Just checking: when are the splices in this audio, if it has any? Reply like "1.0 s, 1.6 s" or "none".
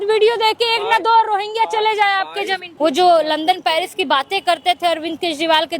2.6 s